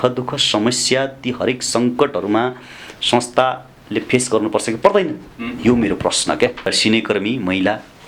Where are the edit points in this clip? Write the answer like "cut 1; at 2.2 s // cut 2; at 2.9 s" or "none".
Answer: cut 1; at 6.7 s